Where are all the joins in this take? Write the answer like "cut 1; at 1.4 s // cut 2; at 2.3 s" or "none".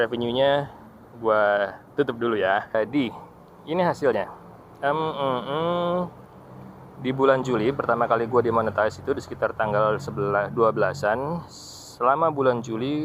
cut 1; at 2.8 s